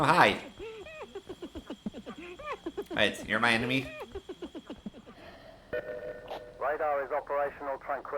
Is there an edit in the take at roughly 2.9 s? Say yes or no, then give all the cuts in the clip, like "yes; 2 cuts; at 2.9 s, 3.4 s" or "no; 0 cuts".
no; 1 cut; at 5.1 s